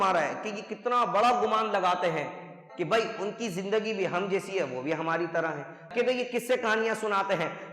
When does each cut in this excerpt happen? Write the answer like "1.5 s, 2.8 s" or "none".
5.8 s